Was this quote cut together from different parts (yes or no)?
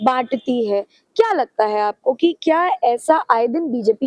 no